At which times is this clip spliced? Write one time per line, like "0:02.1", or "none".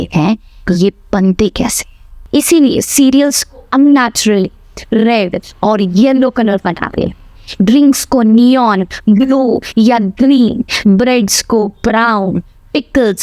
0:02.2